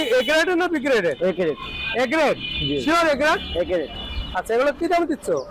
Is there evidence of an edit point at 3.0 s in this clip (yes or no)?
no